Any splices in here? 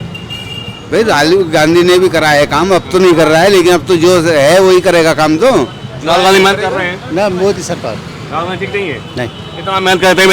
no; 0 cuts

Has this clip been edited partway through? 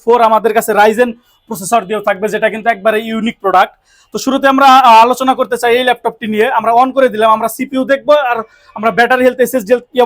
no; 0 cuts

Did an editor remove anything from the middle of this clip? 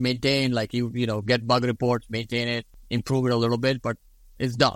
yes; 1 cut; at 2.7 s

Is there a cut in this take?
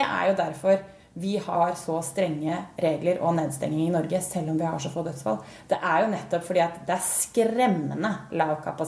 yes; 1 cut; at 1.5 s

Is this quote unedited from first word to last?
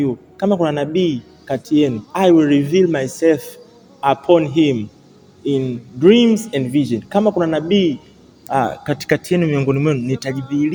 yes; 0 cuts

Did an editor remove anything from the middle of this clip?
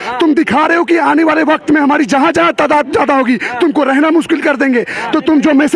no; 0 cuts

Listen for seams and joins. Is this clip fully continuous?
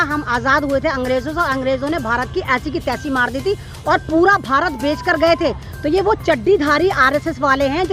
yes; 0 cuts

